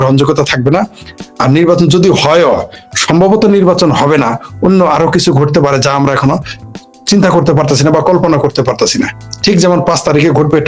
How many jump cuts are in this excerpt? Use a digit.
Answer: 0